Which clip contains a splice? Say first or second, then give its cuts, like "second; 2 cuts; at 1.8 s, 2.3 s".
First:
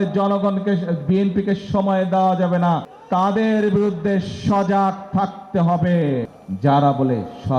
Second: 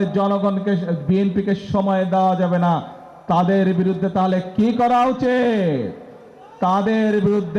first; 2 cuts; at 2.9 s, 6.4 s